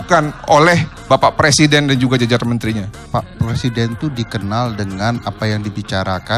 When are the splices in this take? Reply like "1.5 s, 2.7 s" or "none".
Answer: 0.9 s

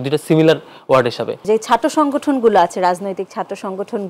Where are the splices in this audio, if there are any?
1.3 s

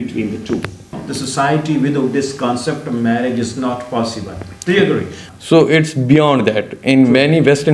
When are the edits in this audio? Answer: 1.0 s, 5.3 s

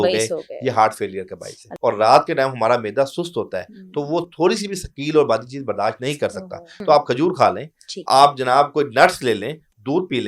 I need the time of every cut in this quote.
1.6 s, 6.7 s

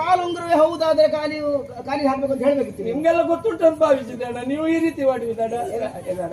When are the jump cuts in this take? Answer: none

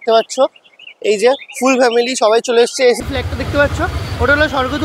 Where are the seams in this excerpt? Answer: 3.0 s

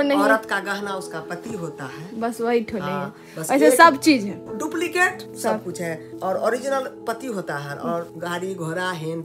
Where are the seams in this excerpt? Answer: none

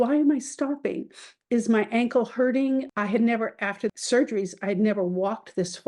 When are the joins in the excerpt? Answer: 2.9 s, 4.0 s

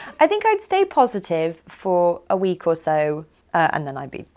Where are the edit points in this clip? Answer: 3.3 s

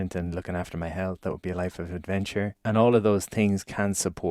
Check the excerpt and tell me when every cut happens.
2.6 s

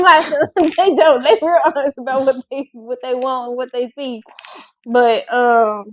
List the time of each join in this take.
none

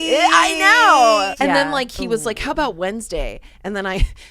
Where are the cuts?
1.3 s

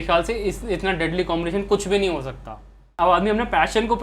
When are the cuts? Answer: 2.9 s

